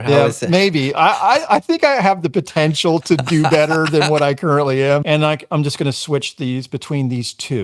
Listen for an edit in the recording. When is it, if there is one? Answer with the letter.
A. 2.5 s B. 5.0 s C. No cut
B